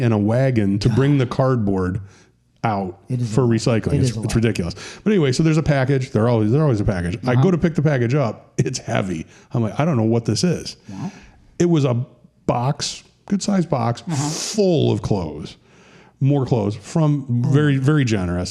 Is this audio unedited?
yes; 0 cuts

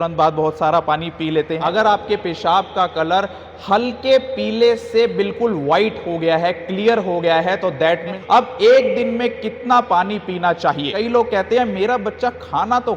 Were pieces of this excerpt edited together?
yes; 3 cuts; at 1.6 s, 8.1 s, 11.1 s

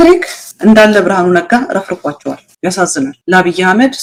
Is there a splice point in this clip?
no; 0 cuts

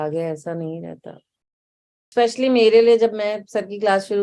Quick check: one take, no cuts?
no; 1 cut; at 2.0 s

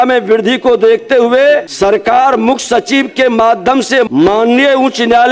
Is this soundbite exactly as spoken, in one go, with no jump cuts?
no; 2 cuts; at 1.7 s, 4.1 s

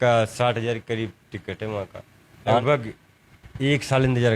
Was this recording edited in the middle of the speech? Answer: yes; 1 cut; at 2.6 s

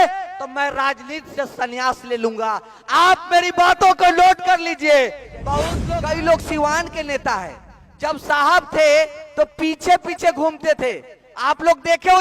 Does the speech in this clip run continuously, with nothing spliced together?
no; 1 cut; at 5.8 s

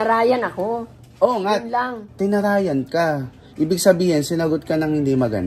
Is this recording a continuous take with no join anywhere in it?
yes; 0 cuts

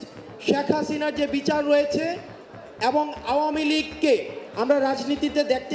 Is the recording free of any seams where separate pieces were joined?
no; 1 cut; at 4.4 s

